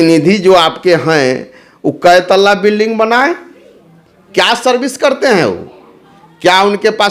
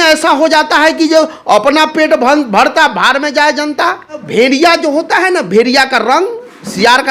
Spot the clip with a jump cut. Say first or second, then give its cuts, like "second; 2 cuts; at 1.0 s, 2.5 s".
second; 1 cut; at 4.2 s